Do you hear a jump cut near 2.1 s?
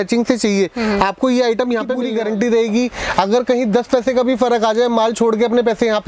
yes; 1 cut; at 2.1 s

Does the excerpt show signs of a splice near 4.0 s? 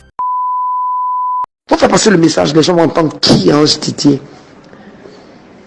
no; 1 cut; at 1.6 s

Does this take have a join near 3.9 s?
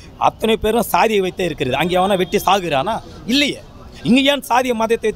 no; 0 cuts

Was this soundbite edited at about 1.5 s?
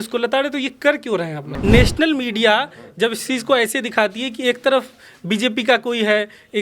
yes; 1 cut; at 1.5 s

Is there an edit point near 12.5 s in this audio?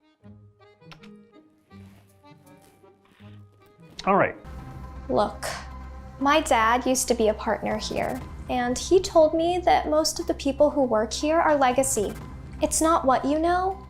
no; 1 cut; at 4.5 s

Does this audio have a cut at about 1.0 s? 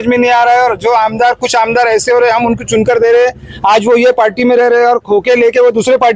no; 0 cuts

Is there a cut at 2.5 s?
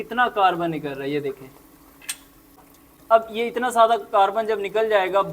yes; 1 cut; at 2.5 s

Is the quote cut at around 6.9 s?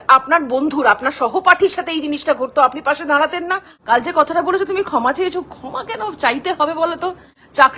no; 1 cut; at 3.7 s

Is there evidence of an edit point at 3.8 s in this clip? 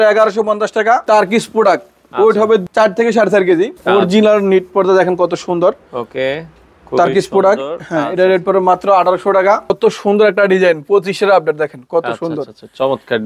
yes; 3 cuts; at 1.0 s, 3.8 s, 9.7 s

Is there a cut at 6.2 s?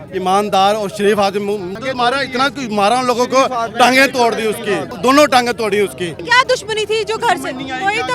yes; 3 cuts; at 1.7 s, 4.9 s, 6.2 s

